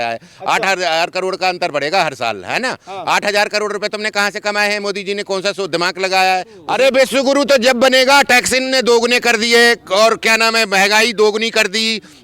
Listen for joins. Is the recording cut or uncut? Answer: cut